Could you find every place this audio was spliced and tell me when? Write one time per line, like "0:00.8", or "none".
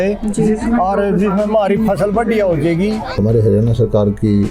0:03.2